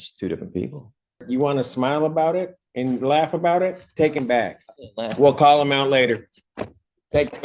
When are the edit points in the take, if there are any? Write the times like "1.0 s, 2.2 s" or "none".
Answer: 1.2 s